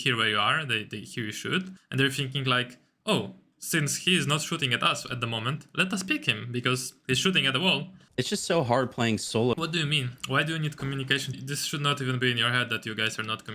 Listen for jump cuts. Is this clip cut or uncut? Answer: cut